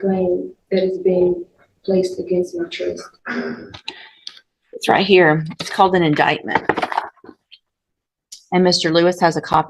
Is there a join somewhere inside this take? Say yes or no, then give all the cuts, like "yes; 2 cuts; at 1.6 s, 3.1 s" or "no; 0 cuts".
no; 0 cuts